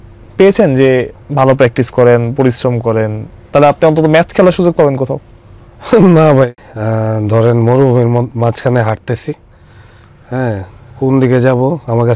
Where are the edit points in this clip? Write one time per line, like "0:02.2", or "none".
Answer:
0:01.2
0:06.5